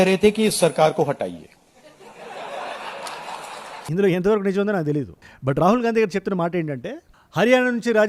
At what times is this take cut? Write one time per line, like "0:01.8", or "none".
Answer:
none

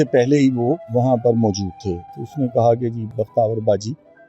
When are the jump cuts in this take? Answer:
0:00.8
0:02.1
0:03.1

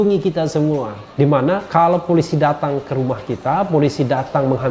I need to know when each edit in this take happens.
0:01.4

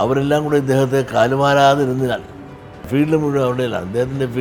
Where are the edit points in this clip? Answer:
0:02.8

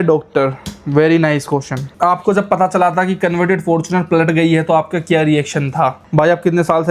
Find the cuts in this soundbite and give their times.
0:01.8
0:06.0

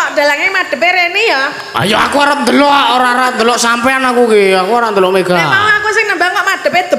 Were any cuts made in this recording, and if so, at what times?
none

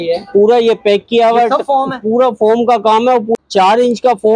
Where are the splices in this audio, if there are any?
0:03.3

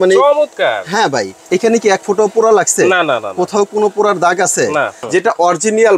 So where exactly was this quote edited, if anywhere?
0:01.4
0:05.0

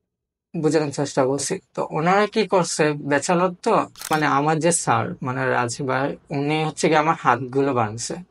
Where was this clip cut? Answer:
0:04.1

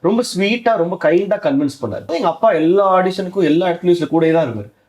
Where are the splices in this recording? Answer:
0:02.1

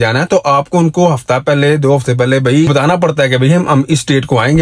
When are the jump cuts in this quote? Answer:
0:02.7

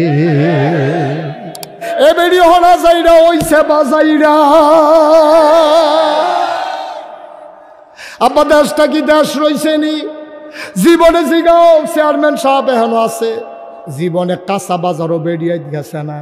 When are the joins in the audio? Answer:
0:01.9

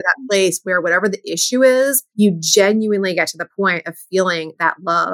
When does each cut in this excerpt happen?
0:02.0

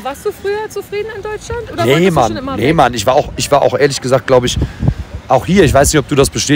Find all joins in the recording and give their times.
none

